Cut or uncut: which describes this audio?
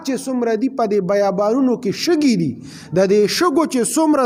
uncut